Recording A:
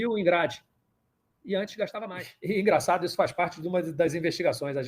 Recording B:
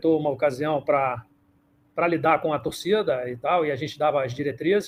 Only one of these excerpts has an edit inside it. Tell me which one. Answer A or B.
A